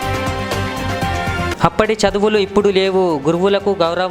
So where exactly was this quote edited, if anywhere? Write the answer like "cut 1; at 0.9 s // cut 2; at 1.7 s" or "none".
cut 1; at 1.5 s